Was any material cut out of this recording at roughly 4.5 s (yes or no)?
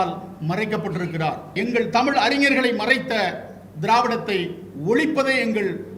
no